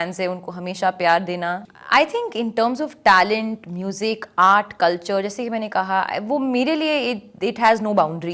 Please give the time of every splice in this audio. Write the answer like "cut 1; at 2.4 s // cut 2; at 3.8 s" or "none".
cut 1; at 1.7 s